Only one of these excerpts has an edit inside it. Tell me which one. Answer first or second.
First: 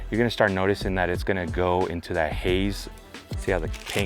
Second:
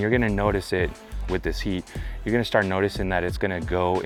first